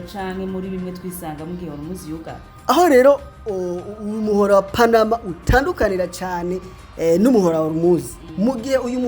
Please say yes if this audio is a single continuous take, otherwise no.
no